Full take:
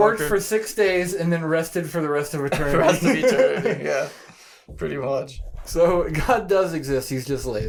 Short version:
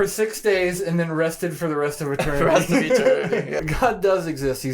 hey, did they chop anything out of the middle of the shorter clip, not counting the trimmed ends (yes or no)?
yes